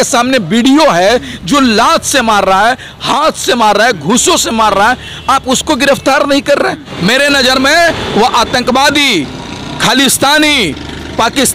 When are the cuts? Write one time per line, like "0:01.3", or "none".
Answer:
0:06.9